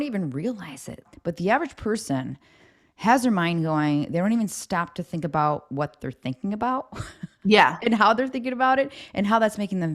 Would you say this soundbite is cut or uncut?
cut